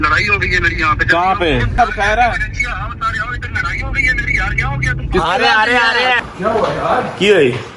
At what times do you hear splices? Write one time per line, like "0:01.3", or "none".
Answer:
0:01.7
0:06.2